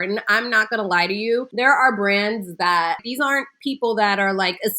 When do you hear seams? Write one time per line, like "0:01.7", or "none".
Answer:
0:01.5
0:03.0